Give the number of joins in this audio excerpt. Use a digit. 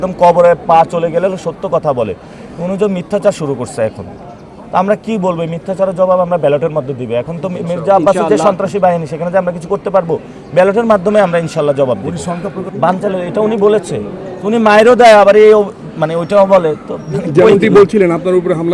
0